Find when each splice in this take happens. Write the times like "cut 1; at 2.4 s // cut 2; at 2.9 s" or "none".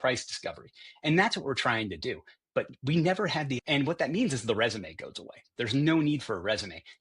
cut 1; at 3.5 s

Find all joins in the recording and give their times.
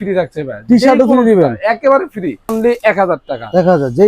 cut 1; at 2.5 s

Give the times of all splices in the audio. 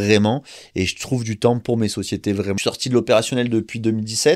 cut 1; at 2.6 s

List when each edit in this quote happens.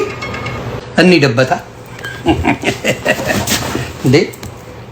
cut 1; at 1.0 s

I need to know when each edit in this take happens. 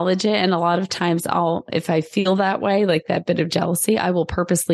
none

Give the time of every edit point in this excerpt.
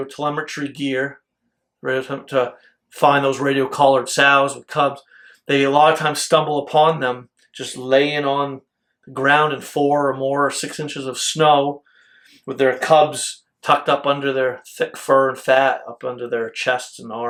none

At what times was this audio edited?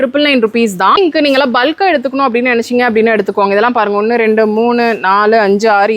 cut 1; at 1.0 s

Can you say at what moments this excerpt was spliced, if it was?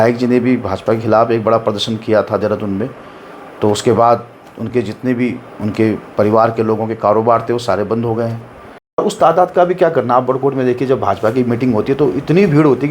cut 1; at 9.0 s

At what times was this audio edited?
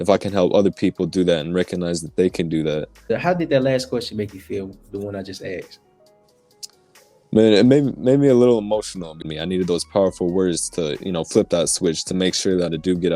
cut 1; at 3.0 s // cut 2; at 9.2 s

